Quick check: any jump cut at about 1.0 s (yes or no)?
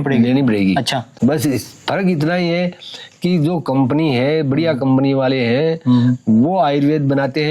yes